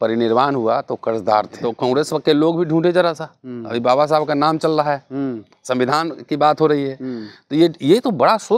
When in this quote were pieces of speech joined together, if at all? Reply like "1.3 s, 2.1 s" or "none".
1.6 s

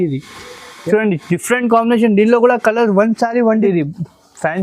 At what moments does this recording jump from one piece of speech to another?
3.5 s

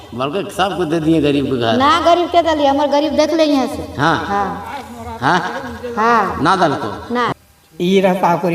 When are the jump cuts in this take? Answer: 7.3 s

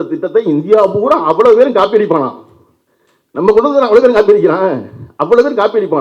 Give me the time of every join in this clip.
none

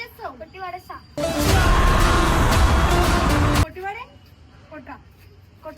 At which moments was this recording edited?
1.1 s, 3.7 s

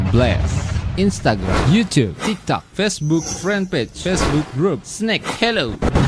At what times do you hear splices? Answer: none

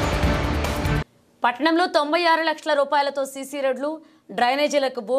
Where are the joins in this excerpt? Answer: 1.0 s

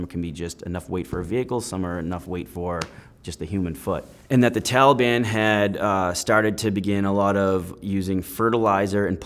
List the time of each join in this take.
4.1 s

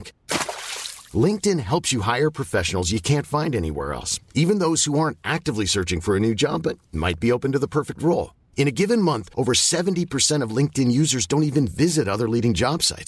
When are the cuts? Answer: none

